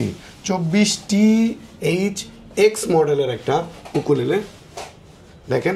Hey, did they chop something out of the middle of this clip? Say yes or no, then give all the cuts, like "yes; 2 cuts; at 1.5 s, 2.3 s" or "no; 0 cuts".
no; 0 cuts